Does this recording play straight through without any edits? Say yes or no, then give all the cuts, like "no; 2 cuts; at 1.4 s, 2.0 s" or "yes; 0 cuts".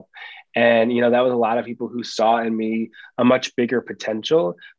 yes; 0 cuts